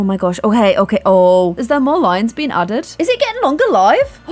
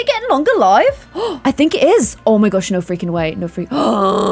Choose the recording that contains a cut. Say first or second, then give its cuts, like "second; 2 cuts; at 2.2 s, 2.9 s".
first; 1 cut; at 1.5 s